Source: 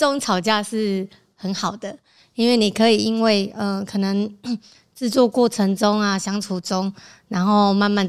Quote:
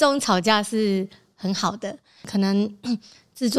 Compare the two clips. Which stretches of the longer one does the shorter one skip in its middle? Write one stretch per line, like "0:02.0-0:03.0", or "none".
0:02.2-0:03.8